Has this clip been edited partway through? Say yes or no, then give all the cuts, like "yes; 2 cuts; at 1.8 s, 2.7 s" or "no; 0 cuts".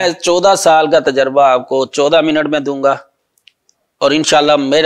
no; 0 cuts